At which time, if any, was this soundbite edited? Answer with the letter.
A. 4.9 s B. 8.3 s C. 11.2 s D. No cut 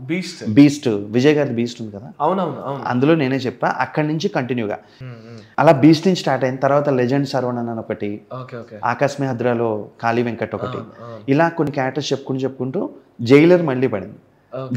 A